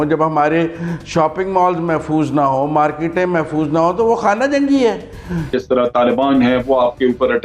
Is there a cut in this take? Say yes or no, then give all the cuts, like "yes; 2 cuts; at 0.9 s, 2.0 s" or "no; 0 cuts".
yes; 1 cut; at 5.5 s